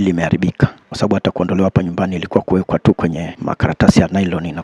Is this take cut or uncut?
cut